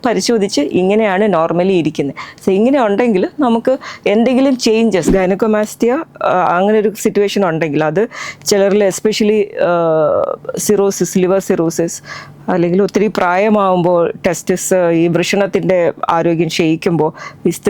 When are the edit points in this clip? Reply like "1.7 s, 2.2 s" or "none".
5.1 s